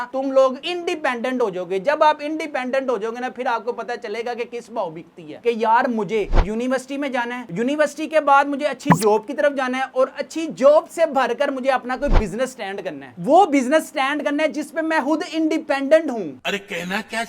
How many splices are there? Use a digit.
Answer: 2